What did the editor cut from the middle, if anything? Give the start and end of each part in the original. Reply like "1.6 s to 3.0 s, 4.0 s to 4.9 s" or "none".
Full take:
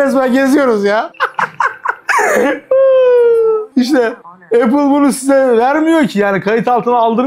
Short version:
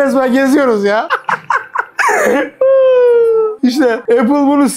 1.1 s to 1.2 s, 3.7 s to 4.1 s